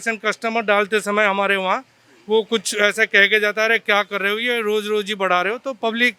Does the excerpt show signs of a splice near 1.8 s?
no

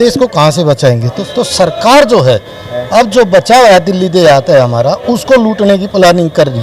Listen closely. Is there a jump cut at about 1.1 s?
yes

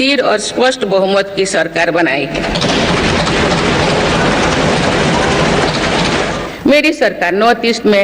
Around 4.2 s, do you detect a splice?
no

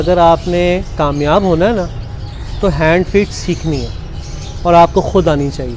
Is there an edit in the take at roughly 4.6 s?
no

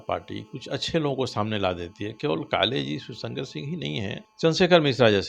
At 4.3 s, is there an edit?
yes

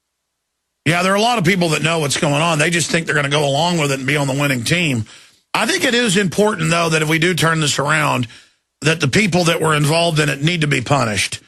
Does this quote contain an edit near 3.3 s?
no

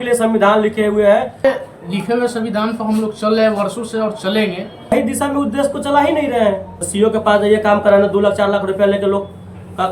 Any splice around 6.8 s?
yes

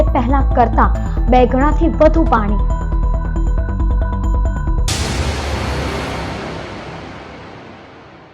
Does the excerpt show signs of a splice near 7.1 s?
no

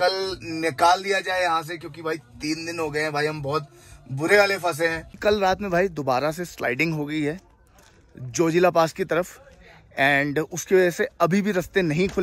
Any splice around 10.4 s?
no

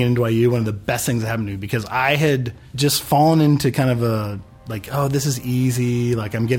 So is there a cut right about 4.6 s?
no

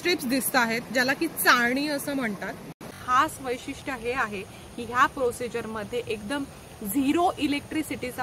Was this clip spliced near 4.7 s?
no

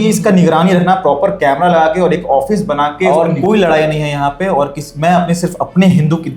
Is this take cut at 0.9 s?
no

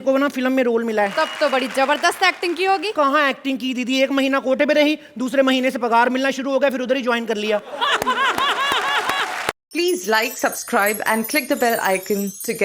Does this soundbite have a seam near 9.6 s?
yes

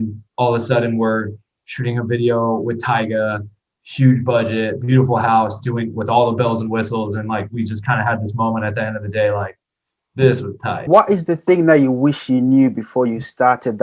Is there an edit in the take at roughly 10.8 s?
yes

